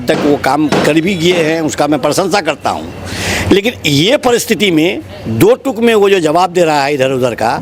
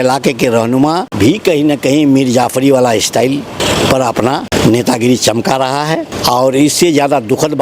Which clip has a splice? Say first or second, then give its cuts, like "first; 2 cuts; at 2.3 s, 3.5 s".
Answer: second; 4 cuts; at 1.1 s, 3.6 s, 4.5 s, 6.1 s